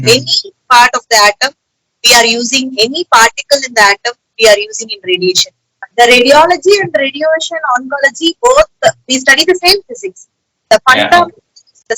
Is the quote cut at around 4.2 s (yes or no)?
no